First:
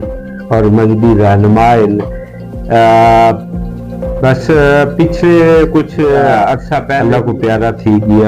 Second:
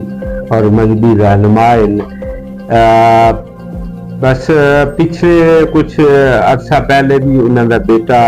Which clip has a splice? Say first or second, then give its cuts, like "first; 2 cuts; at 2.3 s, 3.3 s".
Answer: first; 1 cut; at 7.0 s